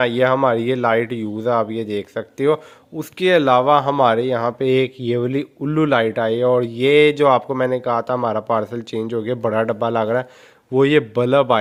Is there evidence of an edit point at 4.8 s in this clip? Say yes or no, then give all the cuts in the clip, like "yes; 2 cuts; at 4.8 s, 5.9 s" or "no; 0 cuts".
no; 0 cuts